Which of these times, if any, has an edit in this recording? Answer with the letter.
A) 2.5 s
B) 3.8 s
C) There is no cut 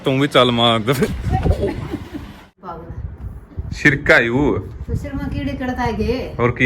A